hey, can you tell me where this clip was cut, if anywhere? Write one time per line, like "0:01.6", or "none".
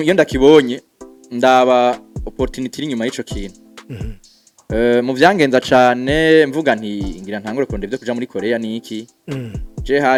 none